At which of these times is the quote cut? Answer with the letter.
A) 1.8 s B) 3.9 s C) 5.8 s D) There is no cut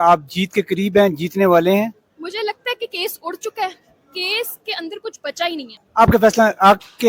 C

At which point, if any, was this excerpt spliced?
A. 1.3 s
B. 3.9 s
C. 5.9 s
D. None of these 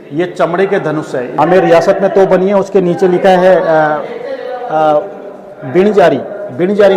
A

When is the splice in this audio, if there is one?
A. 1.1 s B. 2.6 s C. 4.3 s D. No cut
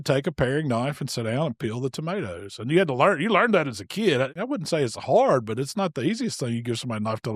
C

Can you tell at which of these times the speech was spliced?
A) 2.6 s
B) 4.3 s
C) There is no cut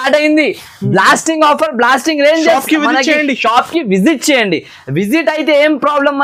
C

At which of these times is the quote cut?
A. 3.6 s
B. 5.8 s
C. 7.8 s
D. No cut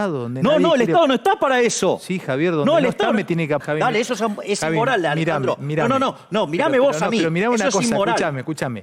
A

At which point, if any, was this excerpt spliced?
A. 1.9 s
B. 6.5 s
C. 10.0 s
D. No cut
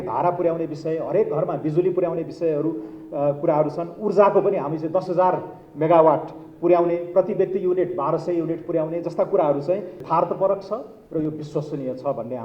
C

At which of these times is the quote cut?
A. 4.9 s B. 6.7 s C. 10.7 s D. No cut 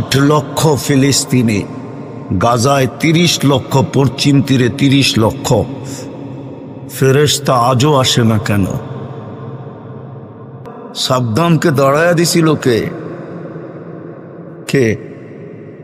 C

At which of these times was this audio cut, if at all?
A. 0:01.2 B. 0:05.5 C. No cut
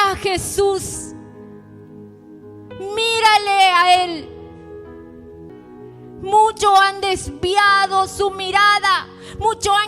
B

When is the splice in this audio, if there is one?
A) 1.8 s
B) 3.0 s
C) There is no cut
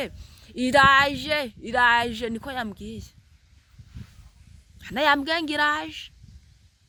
C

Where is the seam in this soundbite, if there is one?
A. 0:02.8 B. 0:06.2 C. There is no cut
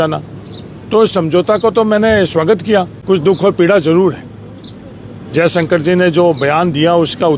A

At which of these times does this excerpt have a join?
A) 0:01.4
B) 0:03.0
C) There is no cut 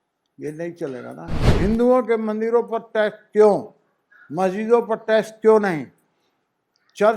A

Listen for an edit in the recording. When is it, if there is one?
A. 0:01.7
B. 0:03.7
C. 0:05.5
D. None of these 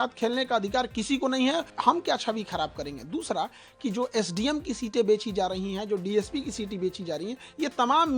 A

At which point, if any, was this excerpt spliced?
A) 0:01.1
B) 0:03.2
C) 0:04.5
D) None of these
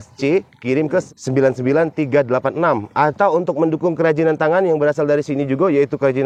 A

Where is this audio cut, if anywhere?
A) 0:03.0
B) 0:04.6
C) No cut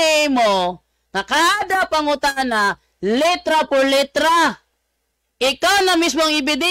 C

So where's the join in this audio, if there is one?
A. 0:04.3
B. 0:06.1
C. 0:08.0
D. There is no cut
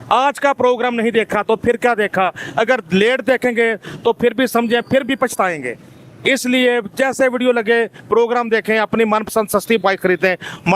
D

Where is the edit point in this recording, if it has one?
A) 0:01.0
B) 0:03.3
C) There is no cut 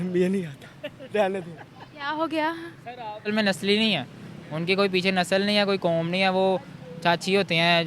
B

